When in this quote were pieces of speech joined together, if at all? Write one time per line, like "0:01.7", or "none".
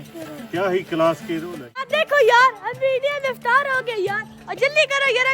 0:01.9